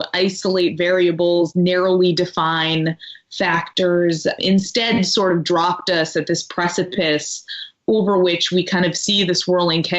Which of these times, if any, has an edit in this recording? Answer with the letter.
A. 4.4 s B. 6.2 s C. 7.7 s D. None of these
A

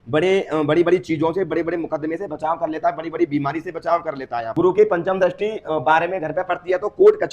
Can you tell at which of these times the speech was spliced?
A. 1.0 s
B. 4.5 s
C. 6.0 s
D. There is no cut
B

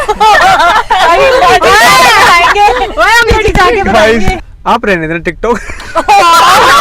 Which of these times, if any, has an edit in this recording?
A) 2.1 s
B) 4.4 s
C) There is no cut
B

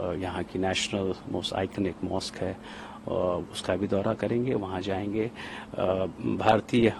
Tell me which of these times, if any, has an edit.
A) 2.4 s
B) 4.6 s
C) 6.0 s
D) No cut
D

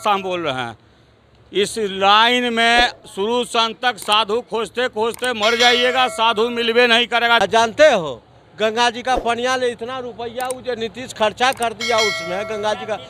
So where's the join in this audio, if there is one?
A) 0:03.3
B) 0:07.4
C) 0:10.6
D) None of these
B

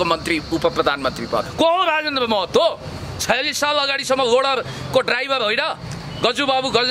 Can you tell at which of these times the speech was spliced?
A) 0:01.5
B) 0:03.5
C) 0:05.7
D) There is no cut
A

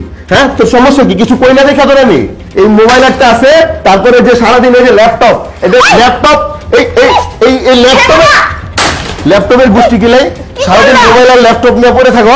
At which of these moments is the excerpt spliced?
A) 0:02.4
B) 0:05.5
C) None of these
A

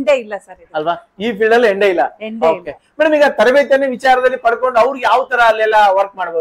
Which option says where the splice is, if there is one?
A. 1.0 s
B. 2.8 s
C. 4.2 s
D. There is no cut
D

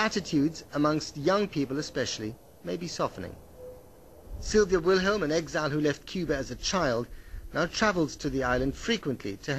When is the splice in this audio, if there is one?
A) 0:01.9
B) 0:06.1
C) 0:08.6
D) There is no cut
A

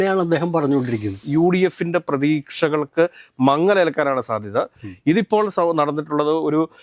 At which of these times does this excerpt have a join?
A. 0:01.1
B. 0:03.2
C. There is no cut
A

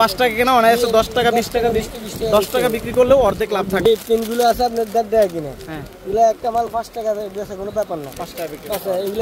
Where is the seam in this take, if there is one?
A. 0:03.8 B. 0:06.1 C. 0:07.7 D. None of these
A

